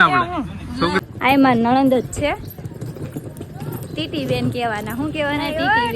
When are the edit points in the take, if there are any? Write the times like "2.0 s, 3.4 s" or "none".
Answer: 1.0 s